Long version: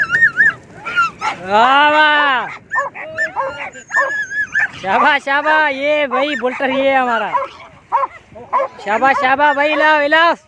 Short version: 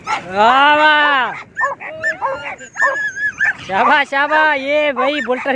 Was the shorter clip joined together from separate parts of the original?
no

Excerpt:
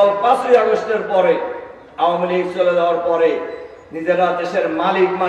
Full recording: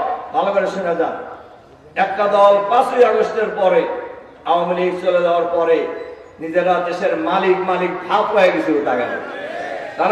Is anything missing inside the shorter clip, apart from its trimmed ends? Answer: no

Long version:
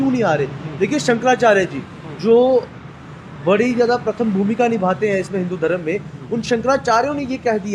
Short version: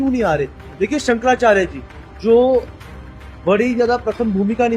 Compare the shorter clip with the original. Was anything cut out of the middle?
no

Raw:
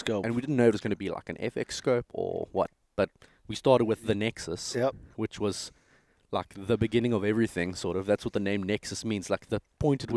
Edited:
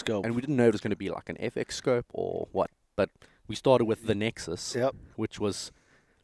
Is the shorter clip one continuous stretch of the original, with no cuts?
yes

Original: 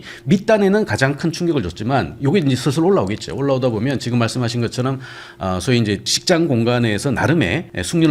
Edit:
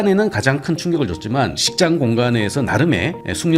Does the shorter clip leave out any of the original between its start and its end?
yes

